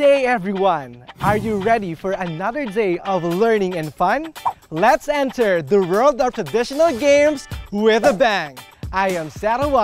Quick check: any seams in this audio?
no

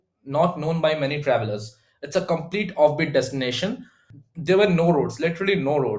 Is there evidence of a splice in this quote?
yes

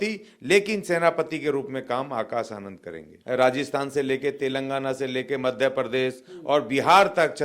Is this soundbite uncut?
no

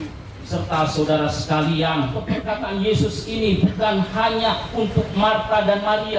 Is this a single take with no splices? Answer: no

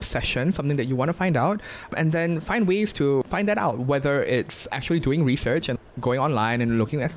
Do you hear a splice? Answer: yes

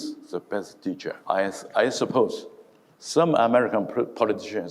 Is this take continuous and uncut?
no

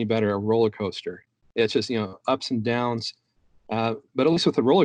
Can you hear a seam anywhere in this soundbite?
no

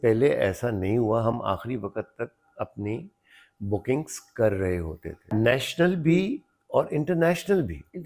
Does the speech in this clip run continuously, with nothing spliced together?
no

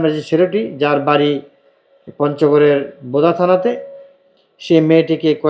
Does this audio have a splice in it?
no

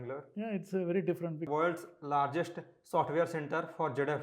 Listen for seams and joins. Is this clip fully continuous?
no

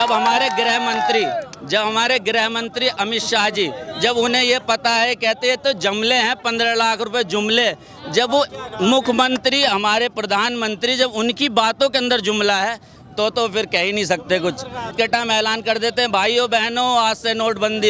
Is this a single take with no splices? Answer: no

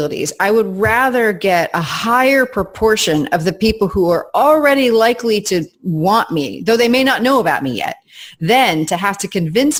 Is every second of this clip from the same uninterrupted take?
yes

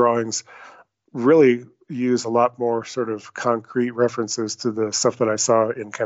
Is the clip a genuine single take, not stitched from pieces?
yes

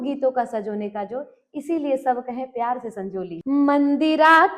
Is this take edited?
yes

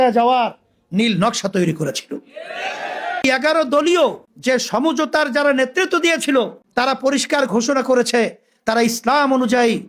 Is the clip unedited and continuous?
no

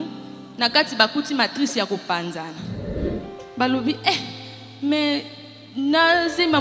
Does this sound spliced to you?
no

